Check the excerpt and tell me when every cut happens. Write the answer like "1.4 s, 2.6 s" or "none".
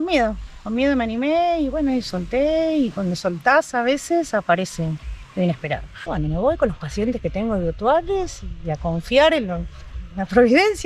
6.0 s

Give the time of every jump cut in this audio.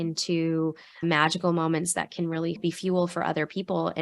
1.0 s, 2.6 s

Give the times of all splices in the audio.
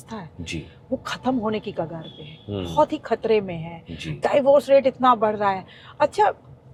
none

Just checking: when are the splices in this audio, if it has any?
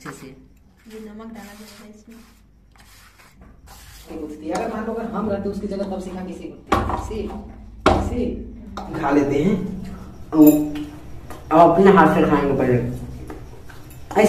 4.1 s, 9.0 s

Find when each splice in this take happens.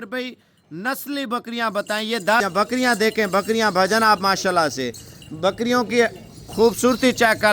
2.4 s

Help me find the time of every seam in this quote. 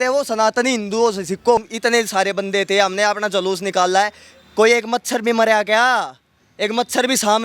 1.7 s

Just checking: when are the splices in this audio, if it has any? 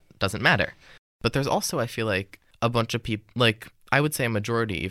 1.1 s, 2.4 s

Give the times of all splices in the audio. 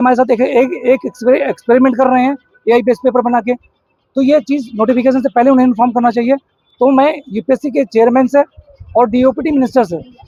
none

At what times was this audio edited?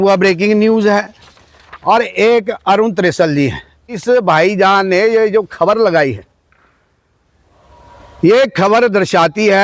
4.0 s

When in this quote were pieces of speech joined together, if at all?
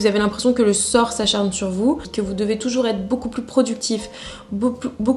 2.1 s

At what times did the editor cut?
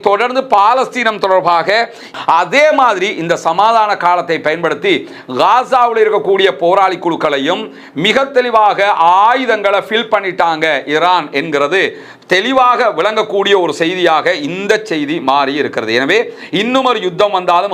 2.1 s

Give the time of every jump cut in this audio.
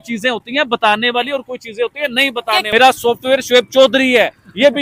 2.7 s

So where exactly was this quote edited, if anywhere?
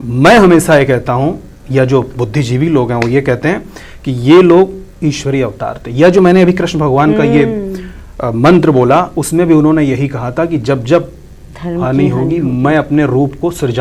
none

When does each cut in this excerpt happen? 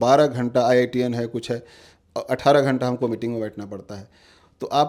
none

